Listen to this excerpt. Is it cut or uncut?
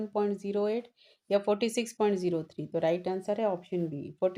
uncut